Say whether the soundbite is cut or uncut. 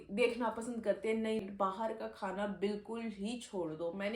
cut